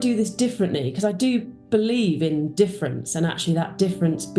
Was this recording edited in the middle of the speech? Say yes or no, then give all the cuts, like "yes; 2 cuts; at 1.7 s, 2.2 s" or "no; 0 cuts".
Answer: no; 0 cuts